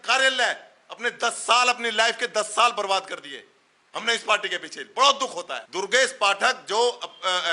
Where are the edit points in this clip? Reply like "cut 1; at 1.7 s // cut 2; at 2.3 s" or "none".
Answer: cut 1; at 5.6 s